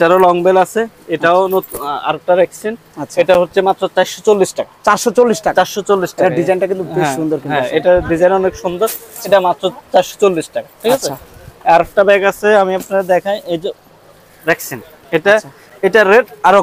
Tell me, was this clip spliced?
no; 0 cuts

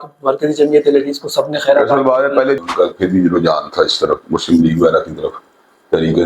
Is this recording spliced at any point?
yes; 1 cut; at 2.6 s

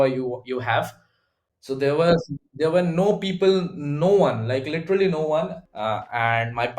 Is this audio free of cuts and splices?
no; 2 cuts; at 1.1 s, 5.6 s

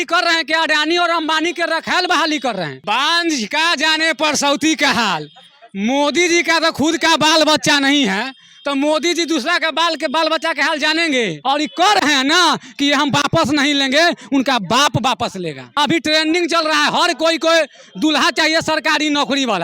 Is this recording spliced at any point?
yes; 3 cuts; at 2.8 s, 11.4 s, 15.6 s

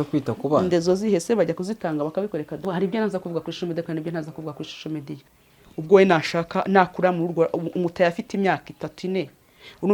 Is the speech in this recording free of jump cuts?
no; 2 cuts; at 2.6 s, 5.3 s

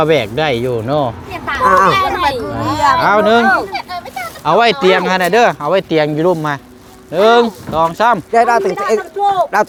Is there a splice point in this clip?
no; 0 cuts

